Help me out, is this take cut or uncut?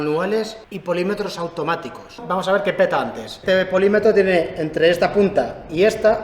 cut